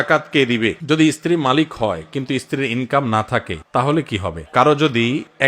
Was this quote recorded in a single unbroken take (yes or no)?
no